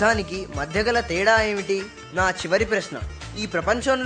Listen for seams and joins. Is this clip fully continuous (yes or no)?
no